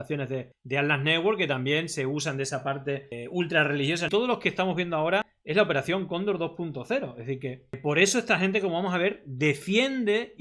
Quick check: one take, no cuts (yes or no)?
no